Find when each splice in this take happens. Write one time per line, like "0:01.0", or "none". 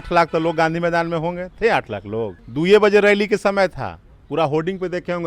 0:02.4